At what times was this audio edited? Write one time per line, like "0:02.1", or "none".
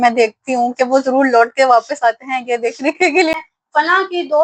0:03.3